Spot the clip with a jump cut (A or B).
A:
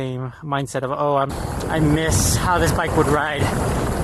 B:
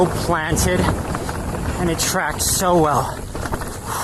A